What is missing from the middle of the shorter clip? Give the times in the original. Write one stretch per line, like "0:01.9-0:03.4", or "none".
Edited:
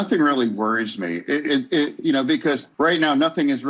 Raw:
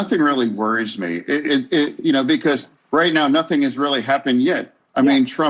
0:02.7-0:02.8